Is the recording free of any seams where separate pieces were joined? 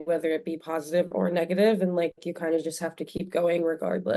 yes; 0 cuts

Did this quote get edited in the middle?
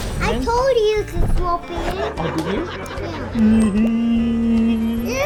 no; 0 cuts

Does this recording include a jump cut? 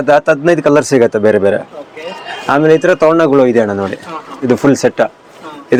no; 0 cuts

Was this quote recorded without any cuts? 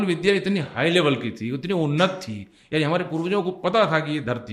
yes; 0 cuts

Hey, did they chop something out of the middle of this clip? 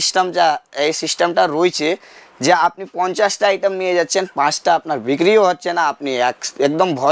no; 0 cuts

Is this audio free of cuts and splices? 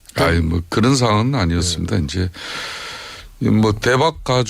no; 1 cut; at 1.6 s

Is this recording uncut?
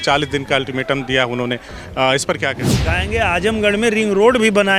no; 1 cut; at 2.9 s

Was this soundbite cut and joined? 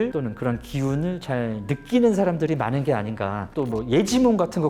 yes; 1 cut; at 3.5 s

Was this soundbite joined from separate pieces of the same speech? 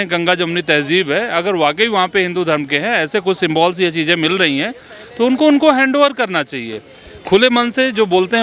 no; 0 cuts

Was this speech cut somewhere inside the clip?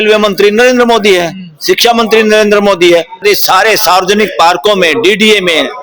yes; 1 cut; at 3.2 s

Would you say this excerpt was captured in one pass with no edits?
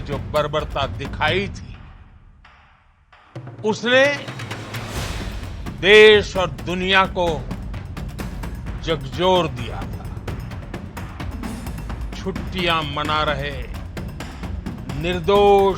no; 2 cuts; at 10.1 s, 12.2 s

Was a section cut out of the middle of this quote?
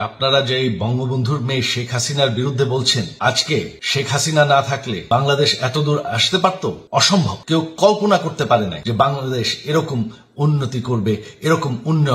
yes; 5 cuts; at 3.1 s, 3.8 s, 4.9 s, 7.1 s, 8.8 s

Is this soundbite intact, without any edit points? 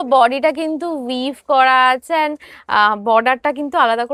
yes; 0 cuts

